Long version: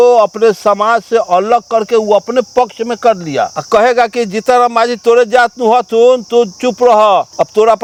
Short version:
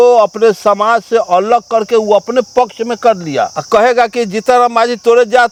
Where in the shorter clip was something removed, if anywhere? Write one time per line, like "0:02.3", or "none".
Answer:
none

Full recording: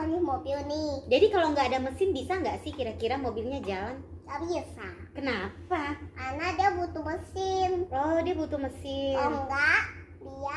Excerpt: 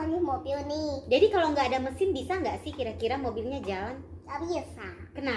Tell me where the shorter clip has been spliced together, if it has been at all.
none

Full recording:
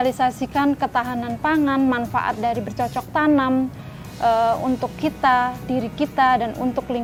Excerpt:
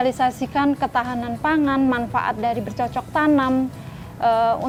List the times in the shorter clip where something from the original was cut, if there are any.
none

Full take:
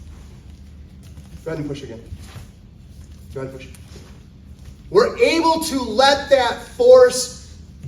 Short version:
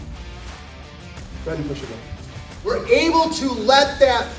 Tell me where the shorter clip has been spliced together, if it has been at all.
0:02.7

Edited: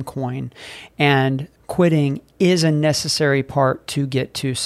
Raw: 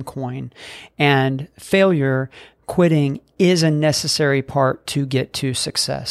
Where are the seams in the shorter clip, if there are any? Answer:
0:01.5

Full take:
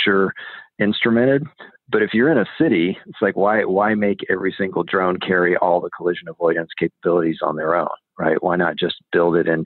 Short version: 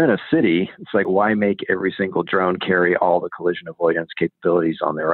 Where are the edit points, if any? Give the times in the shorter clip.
0:01.1

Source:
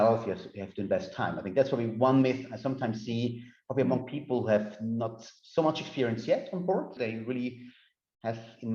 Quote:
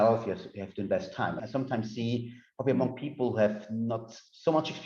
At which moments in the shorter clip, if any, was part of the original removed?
0:01.4

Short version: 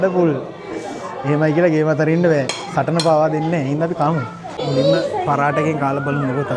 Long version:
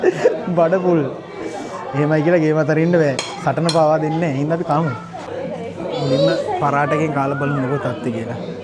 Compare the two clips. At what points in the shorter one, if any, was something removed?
0:04.6

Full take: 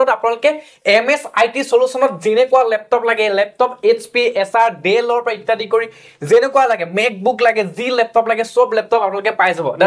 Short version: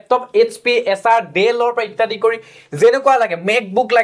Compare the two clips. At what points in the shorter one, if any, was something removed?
none

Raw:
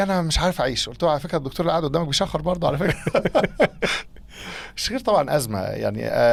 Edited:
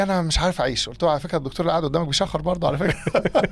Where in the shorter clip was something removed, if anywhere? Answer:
none

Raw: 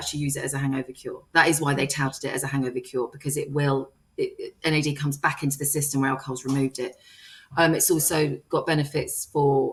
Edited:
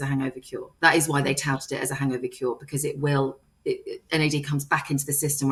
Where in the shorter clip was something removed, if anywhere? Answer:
none

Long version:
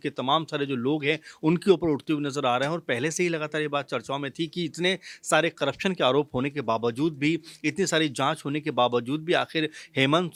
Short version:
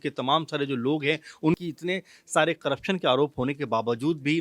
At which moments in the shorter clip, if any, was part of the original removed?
0:01.6

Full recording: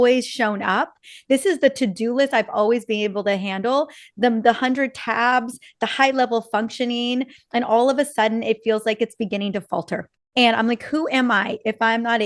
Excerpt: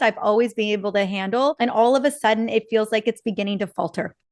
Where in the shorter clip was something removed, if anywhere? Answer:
0:01.6

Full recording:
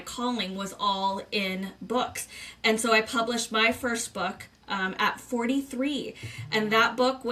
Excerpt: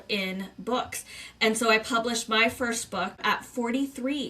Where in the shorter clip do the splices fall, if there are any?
0:03.2

